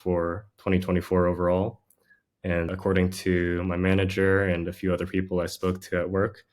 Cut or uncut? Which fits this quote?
uncut